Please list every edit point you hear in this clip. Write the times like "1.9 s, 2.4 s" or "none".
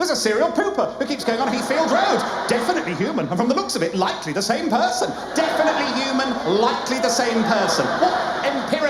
none